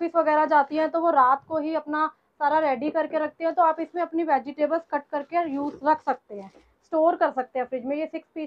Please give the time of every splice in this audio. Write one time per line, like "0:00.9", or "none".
none